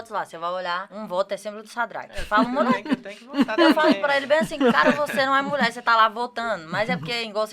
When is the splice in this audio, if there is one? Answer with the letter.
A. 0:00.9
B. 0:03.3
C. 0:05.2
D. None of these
A